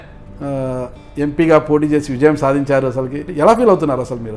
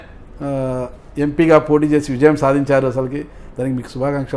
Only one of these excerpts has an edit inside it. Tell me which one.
first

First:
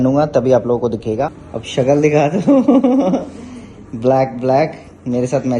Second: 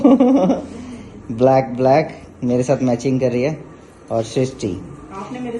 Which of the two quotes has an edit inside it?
first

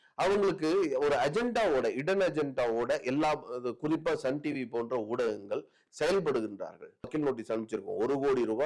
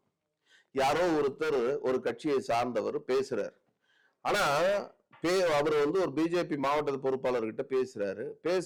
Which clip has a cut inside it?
first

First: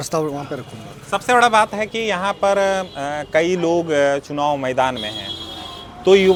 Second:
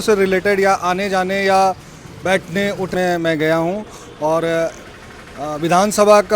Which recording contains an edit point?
second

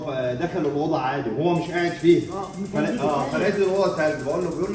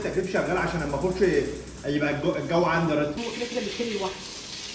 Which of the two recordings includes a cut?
second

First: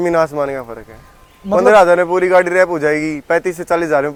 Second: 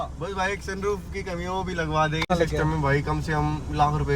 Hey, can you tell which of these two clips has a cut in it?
second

